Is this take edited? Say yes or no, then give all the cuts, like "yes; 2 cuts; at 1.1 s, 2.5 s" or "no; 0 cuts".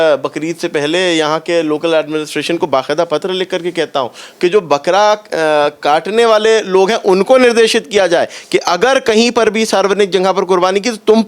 no; 0 cuts